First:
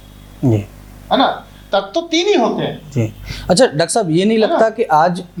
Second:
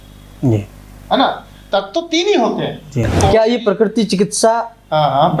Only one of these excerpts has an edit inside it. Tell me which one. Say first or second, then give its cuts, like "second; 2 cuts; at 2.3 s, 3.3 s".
second; 1 cut; at 3.1 s